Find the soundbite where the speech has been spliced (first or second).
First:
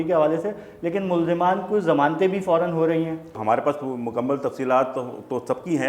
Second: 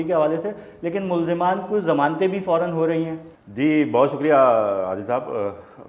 first